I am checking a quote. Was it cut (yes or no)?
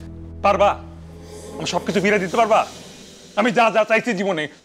no